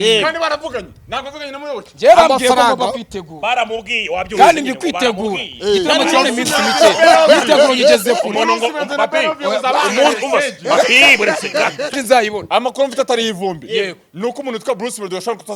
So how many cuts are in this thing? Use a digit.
1